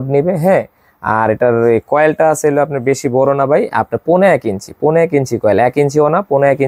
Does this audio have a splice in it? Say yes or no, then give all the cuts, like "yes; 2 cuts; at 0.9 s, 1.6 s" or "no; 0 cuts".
no; 0 cuts